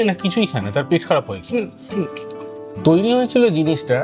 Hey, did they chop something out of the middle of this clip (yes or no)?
yes